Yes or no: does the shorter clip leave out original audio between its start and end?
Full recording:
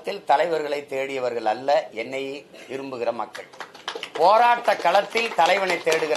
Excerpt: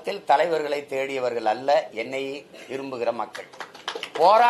no